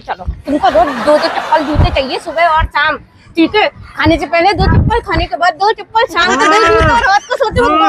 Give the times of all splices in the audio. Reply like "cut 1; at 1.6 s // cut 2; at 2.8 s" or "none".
cut 1; at 7.0 s